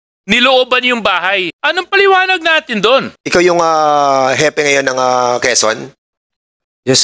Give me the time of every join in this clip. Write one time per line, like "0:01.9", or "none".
0:01.5
0:03.2